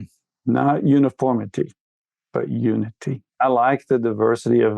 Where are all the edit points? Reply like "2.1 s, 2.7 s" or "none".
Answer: 3.3 s